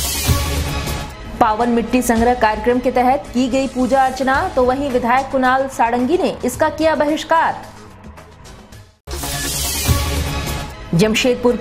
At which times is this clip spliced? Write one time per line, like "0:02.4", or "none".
0:00.9